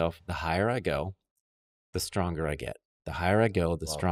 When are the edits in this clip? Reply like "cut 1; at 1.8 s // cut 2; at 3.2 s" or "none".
none